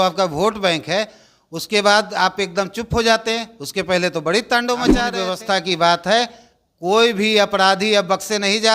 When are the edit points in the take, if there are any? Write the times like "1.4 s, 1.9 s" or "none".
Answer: 5.1 s